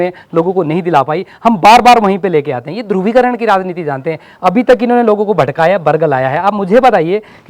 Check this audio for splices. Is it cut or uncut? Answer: uncut